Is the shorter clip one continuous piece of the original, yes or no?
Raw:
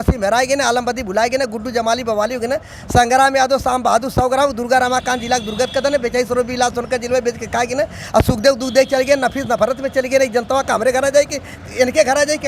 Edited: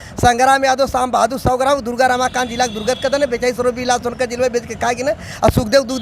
yes